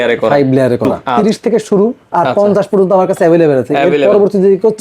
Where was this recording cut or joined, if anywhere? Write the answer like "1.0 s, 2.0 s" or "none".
1.0 s